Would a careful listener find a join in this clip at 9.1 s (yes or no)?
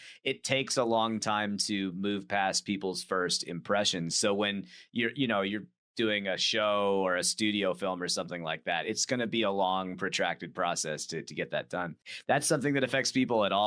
no